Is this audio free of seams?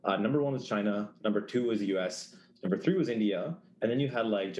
yes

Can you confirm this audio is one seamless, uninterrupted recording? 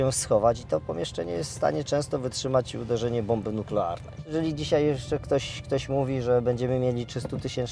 no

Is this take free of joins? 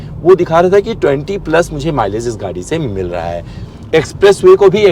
no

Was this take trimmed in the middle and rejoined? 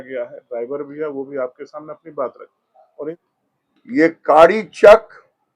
yes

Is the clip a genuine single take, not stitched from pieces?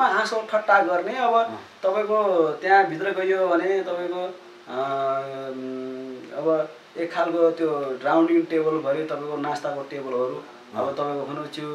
yes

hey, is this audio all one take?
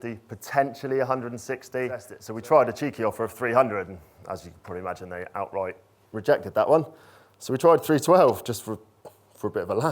no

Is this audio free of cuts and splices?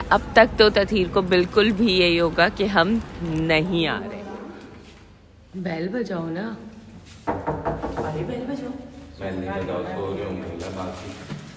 no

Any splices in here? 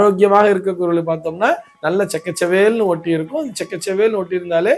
no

